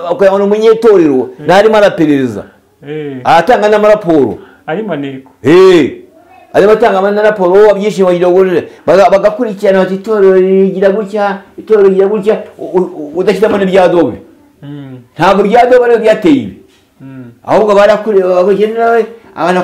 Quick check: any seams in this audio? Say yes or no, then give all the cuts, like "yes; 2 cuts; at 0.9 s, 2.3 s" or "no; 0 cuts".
no; 0 cuts